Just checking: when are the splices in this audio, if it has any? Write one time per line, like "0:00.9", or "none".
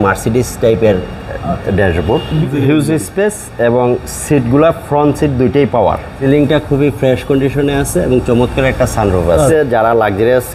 0:02.4
0:06.1
0:09.5